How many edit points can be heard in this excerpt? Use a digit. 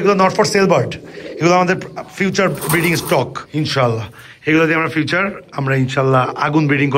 0